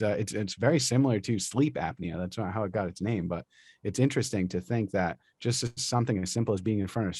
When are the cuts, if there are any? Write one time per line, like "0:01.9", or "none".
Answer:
none